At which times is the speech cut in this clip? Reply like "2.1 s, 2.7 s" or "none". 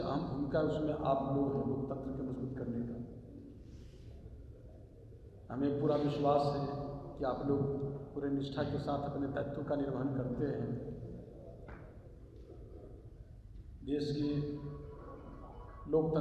none